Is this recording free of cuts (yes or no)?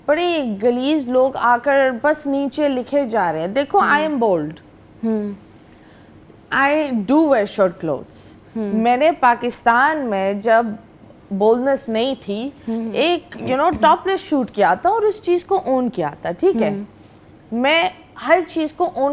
yes